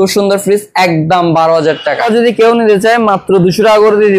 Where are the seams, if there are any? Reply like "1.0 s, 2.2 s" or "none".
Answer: 2.1 s